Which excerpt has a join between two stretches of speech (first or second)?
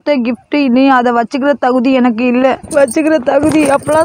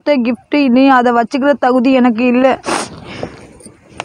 first